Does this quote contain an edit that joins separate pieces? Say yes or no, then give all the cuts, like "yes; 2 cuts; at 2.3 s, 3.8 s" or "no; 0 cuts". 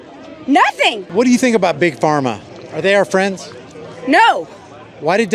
yes; 1 cut; at 1.0 s